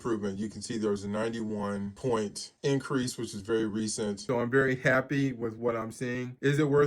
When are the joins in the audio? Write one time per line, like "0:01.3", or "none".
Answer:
0:04.2